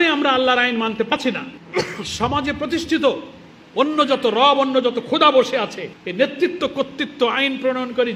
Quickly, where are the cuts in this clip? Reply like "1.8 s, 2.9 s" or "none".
1.1 s